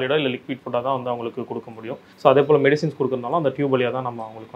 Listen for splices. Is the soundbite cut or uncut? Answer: cut